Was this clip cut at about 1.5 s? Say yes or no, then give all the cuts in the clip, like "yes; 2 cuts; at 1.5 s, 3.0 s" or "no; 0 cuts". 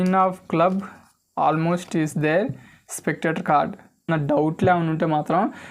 no; 1 cut; at 4.1 s